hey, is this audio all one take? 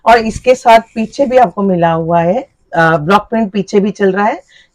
yes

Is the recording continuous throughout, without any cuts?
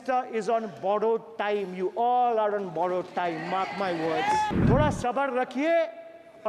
no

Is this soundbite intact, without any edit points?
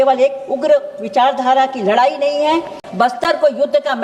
no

